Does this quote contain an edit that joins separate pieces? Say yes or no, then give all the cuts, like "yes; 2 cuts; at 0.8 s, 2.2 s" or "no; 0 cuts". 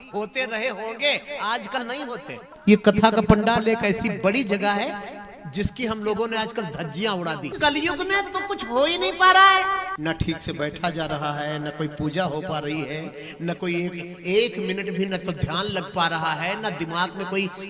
yes; 3 cuts; at 2.5 s, 7.5 s, 9.9 s